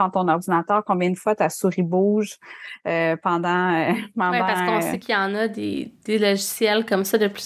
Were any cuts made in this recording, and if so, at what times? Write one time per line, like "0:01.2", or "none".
0:04.8